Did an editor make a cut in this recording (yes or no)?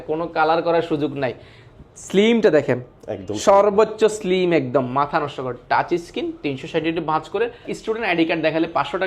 yes